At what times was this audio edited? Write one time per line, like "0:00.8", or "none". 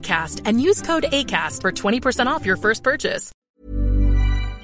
0:03.3